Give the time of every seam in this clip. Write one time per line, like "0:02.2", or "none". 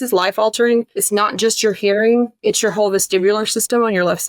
0:01.0
0:02.3

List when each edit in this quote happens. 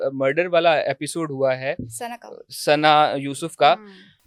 none

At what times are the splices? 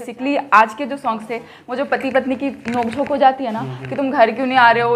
none

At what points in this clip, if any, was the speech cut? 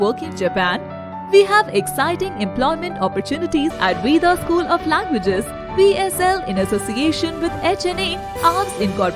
0:03.8

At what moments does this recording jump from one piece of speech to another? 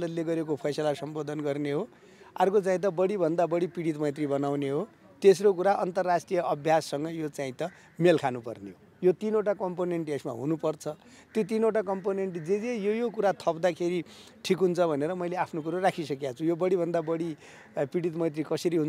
none

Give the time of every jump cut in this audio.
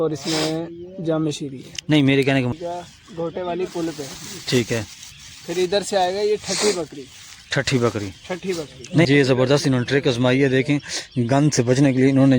0:02.5
0:09.1

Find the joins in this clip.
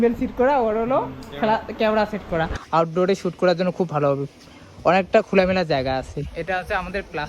0:02.6

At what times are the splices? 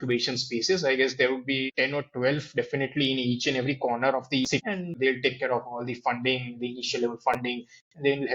0:01.7
0:04.9

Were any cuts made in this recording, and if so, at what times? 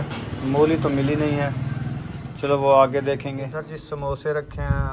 0:03.5

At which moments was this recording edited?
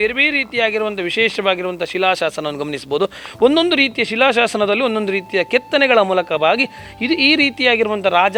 none

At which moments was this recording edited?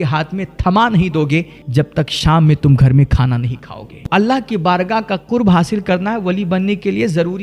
0:01.6
0:04.0

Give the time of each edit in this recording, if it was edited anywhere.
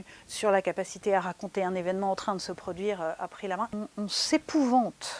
0:03.8

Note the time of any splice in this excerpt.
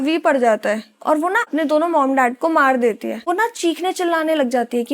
0:01.5
0:03.1

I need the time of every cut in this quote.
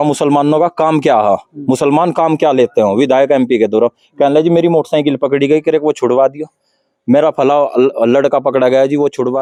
none

